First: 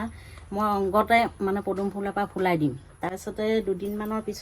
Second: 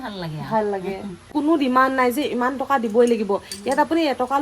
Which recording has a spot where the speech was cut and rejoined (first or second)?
second